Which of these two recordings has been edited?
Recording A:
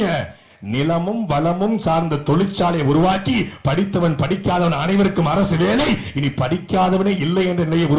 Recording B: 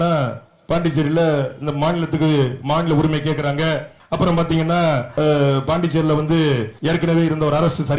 B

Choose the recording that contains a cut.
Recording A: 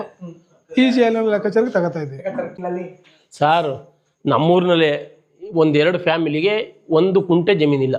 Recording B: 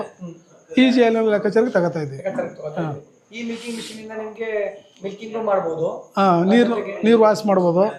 A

